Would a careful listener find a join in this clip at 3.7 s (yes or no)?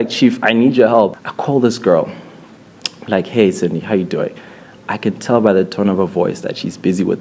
no